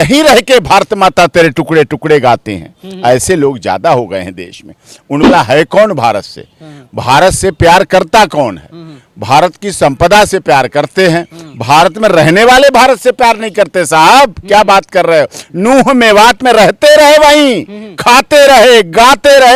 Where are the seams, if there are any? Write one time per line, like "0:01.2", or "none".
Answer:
0:05.3

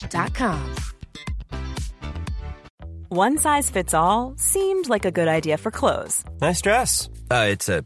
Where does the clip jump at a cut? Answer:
0:02.7

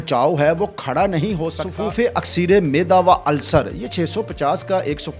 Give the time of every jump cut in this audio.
0:01.6

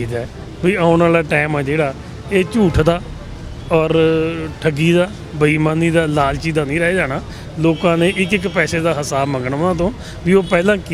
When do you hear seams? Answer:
none

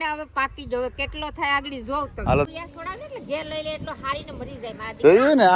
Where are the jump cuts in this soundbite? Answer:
0:02.5

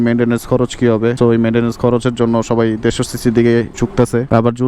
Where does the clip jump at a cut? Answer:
0:01.2
0:03.8

